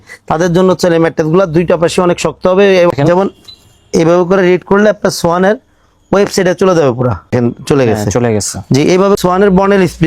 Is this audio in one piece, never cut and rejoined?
no; 3 cuts; at 2.9 s, 7.3 s, 9.2 s

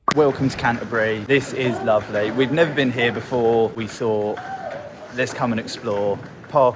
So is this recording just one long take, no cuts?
no; 2 cuts; at 1.2 s, 3.8 s

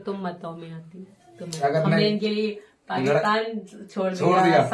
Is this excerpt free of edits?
no; 1 cut; at 1.6 s

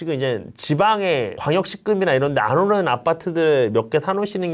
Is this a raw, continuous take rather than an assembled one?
yes; 0 cuts

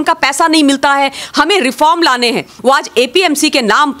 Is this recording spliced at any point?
yes; 1 cut; at 2.5 s

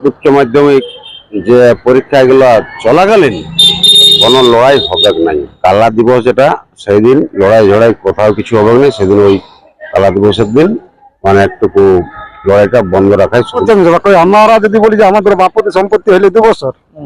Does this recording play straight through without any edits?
no; 2 cuts; at 5.5 s, 13.6 s

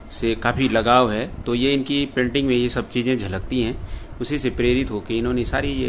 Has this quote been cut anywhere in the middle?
no; 0 cuts

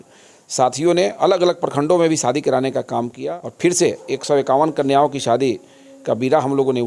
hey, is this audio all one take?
no; 1 cut; at 3.2 s

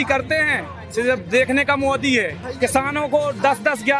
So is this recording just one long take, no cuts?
no; 1 cut; at 2.4 s

